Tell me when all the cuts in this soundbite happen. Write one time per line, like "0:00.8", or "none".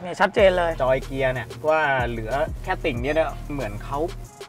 0:03.5